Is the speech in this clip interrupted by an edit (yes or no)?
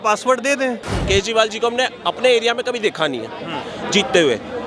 yes